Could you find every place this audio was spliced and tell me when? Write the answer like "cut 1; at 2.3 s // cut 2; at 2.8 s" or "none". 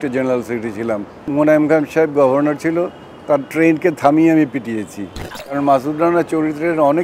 cut 1; at 1.2 s // cut 2; at 5.6 s